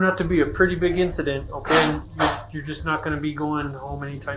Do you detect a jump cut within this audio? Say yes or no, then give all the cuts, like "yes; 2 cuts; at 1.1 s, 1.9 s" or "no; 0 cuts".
no; 0 cuts